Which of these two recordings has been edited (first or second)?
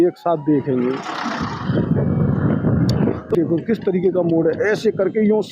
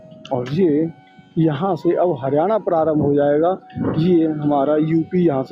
first